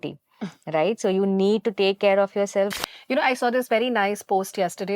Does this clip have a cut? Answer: yes; 1 cut; at 2.8 s

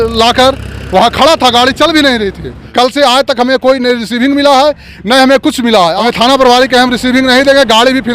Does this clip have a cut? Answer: yes; 2 cuts; at 2.6 s, 6.0 s

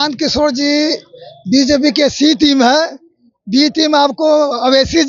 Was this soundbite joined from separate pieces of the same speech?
no; 0 cuts

